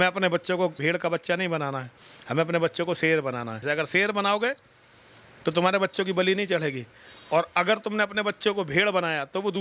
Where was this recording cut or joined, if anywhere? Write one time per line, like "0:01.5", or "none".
0:00.8
0:03.6